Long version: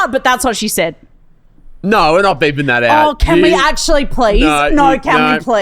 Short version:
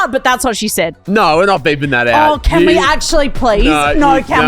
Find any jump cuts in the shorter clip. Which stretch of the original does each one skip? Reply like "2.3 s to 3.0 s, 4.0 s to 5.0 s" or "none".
1.0 s to 1.7 s